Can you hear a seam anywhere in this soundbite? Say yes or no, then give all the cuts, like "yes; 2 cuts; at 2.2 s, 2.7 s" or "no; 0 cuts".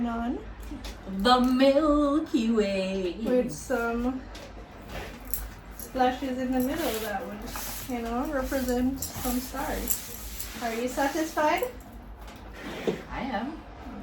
no; 0 cuts